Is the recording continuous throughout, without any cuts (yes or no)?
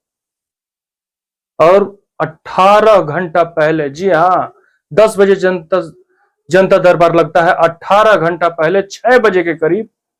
yes